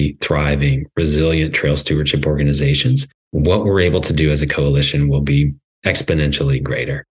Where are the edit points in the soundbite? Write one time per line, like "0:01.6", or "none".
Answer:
0:03.1
0:05.7

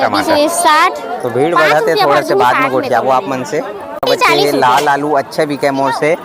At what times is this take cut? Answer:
0:04.0

